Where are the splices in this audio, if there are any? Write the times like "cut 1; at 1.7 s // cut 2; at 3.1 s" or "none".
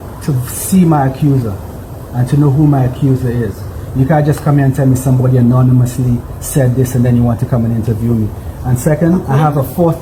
none